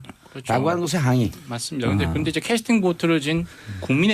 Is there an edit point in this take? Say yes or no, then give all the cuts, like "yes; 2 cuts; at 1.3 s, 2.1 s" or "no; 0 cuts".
yes; 1 cut; at 2.8 s